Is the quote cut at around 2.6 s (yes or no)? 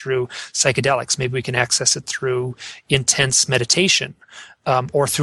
no